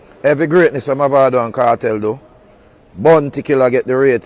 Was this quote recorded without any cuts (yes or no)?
yes